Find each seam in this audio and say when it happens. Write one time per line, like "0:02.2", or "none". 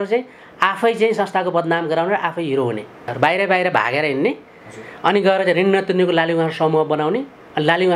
0:03.1